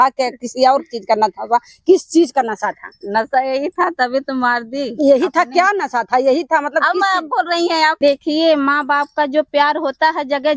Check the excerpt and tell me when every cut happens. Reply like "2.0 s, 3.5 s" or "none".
8.0 s